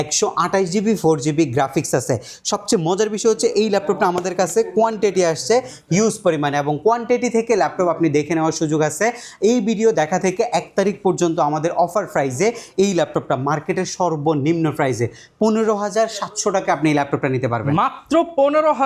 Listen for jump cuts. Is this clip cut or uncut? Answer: uncut